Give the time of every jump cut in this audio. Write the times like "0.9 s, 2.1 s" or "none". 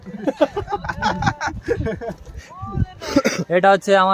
3.1 s